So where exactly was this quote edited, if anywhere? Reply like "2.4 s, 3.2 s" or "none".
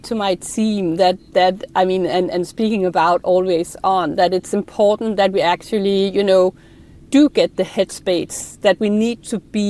none